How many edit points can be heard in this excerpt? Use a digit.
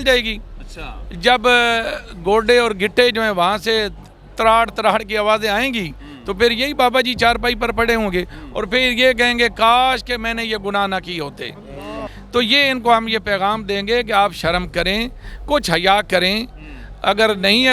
1